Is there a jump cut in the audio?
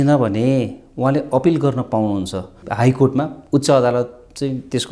yes; 1 cut; at 2.6 s

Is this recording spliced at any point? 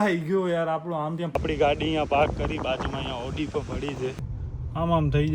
yes; 2 cuts; at 1.4 s, 4.3 s

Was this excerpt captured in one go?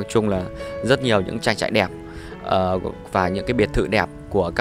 yes; 0 cuts

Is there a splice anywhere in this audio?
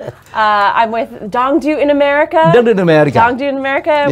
no; 0 cuts

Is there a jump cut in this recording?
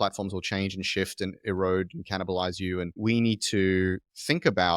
yes; 1 cut; at 3.0 s

